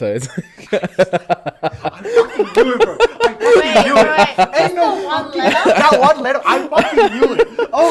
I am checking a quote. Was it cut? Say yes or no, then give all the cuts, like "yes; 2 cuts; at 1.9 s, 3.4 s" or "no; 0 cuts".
no; 0 cuts